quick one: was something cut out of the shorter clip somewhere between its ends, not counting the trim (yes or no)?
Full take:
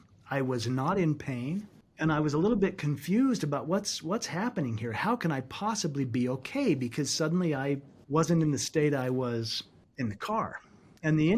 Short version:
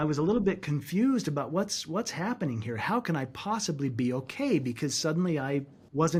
no